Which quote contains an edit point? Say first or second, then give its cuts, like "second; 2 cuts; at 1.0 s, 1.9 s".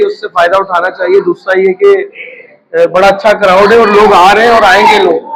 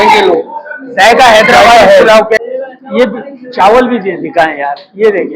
second; 1 cut; at 2.4 s